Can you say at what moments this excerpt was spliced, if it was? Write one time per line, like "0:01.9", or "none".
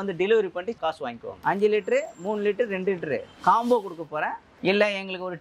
0:01.3
0:04.4